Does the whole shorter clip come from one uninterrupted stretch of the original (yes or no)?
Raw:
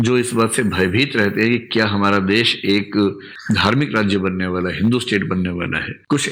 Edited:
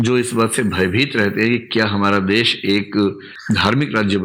yes